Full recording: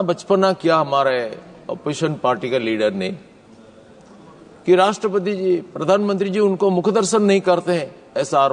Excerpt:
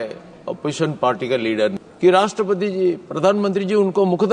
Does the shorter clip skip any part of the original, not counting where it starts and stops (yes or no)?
yes